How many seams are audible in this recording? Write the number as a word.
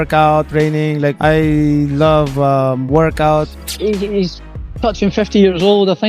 one